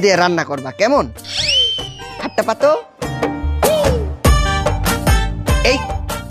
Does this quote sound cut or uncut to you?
uncut